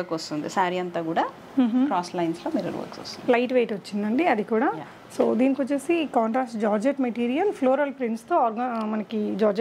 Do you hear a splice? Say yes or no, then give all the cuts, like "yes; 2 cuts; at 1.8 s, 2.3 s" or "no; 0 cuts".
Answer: no; 0 cuts